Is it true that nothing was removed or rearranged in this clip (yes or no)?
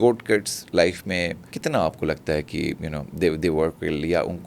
no